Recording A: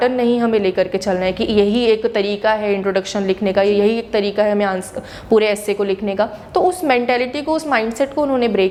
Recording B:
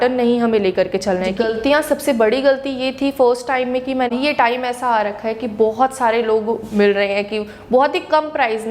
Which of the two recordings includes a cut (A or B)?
B